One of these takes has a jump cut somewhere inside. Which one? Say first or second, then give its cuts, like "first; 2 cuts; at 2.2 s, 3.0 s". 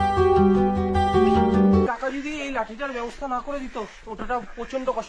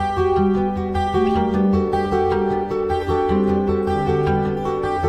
first; 1 cut; at 1.9 s